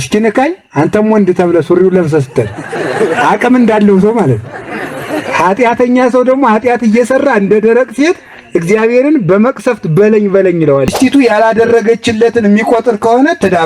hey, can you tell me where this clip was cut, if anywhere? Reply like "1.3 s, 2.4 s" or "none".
10.9 s